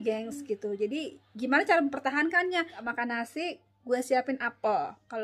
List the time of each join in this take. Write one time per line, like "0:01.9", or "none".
0:02.9